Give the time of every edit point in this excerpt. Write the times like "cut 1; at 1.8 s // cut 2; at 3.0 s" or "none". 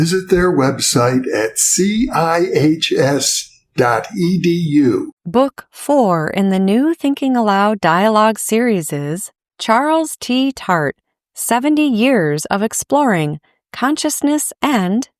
cut 1; at 5.2 s